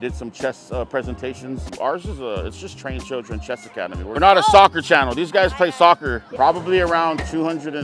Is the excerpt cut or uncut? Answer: cut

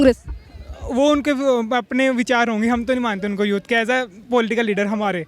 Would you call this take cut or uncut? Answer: uncut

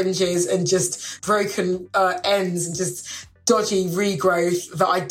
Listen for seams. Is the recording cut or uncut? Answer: cut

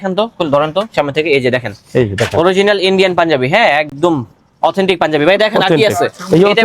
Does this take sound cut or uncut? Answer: uncut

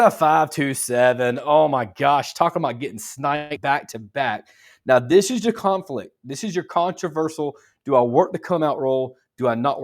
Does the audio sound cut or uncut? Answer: uncut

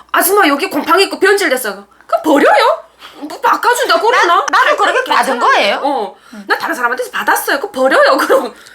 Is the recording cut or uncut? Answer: uncut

